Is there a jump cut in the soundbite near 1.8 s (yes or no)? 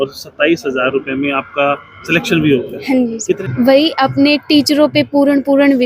no